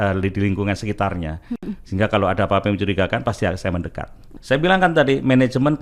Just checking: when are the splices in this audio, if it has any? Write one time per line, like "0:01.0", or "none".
0:04.3

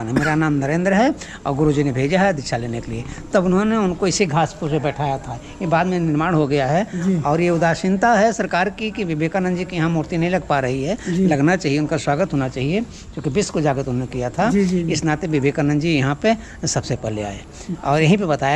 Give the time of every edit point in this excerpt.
none

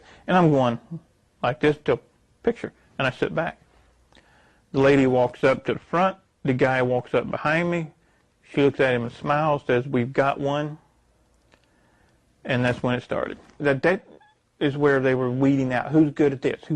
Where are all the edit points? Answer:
0:13.6

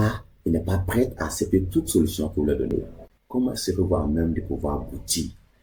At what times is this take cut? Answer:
none

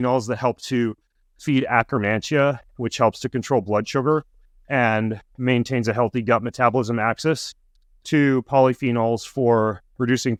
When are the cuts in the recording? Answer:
none

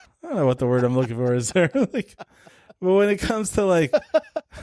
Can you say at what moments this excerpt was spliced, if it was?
none

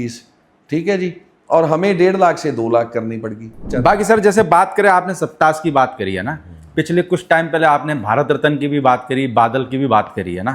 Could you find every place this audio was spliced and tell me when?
0:03.7

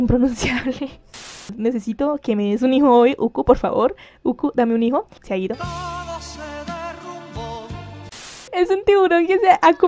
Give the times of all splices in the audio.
0:01.1
0:05.2
0:08.5

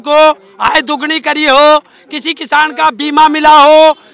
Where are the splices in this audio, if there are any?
none

